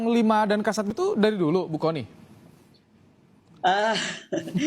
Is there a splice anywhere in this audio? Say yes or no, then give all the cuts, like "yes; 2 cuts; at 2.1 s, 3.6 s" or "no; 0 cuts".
yes; 1 cut; at 0.9 s